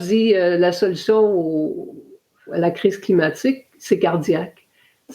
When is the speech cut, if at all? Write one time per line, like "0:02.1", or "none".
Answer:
0:02.5

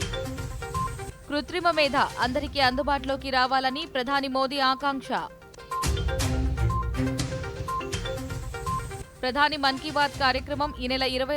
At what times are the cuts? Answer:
none

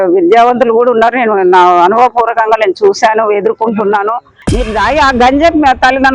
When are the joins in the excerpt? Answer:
0:04.4

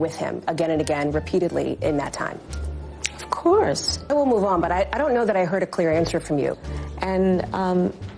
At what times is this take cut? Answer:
0:04.0
0:06.5

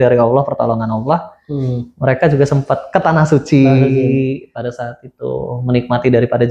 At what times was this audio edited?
none

